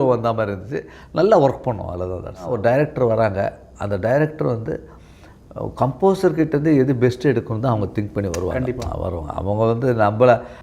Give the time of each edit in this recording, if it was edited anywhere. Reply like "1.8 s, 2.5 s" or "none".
2.5 s